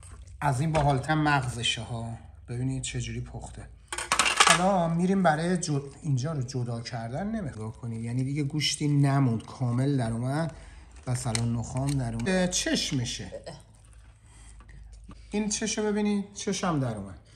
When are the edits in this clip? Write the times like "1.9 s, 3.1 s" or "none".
1.1 s, 7.6 s, 12.3 s, 15.1 s